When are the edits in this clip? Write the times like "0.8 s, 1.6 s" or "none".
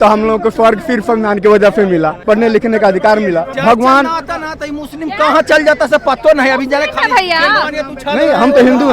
2.2 s, 3.5 s